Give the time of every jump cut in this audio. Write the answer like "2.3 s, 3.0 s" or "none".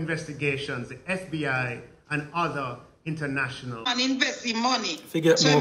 4.0 s